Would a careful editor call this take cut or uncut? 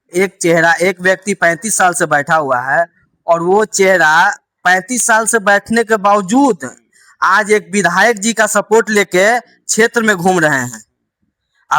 uncut